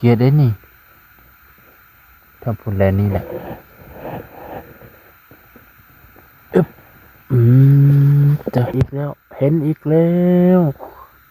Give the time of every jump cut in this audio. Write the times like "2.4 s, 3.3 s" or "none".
8.7 s